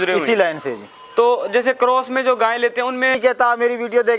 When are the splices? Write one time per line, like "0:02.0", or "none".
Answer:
0:03.2

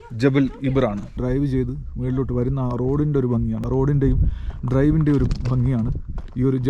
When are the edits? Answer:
0:01.1
0:03.6

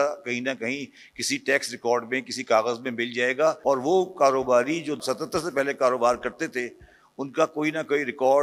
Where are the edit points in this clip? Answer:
0:03.6
0:05.0

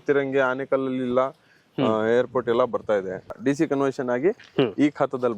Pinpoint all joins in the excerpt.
0:03.3

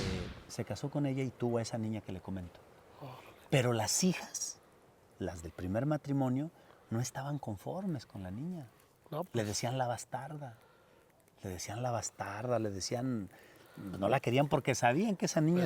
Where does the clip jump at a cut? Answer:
none

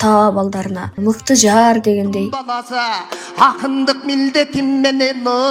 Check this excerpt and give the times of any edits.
0:02.4

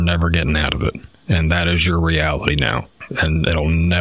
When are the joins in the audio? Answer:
none

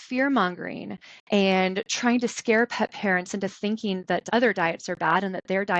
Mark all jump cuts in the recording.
0:04.2

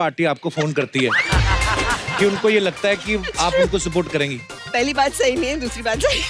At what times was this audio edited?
0:04.6

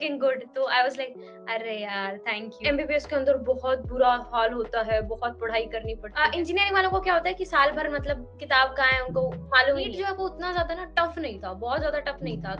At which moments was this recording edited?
0:02.5
0:06.0
0:09.9

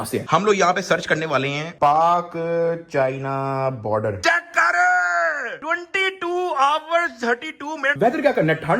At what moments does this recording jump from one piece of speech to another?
0:04.2
0:07.9

